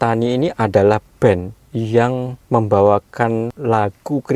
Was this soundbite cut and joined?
yes; 3 cuts; at 1.6 s, 2.4 s, 3.5 s

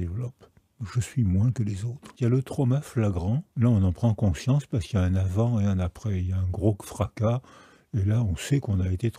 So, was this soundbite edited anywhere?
yes; 2 cuts; at 2.1 s, 3.5 s

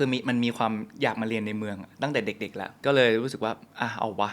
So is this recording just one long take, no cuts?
no; 1 cut; at 2.7 s

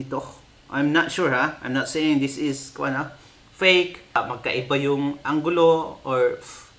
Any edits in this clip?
yes; 1 cut; at 4.2 s

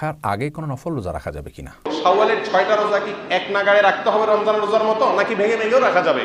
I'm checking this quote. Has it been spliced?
yes; 1 cut; at 1.9 s

